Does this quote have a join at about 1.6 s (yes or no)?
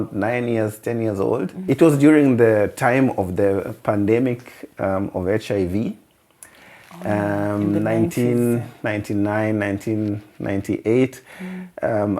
yes